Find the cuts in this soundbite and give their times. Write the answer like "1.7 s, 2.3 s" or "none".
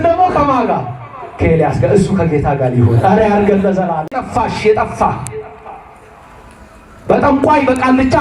4.1 s